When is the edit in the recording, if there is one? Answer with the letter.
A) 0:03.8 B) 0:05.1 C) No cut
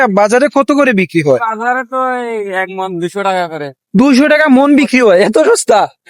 C